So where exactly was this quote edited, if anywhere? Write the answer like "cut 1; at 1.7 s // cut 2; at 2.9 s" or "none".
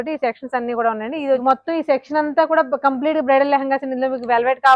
cut 1; at 1.4 s